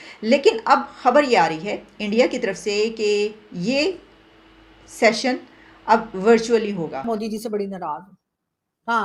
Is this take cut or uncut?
cut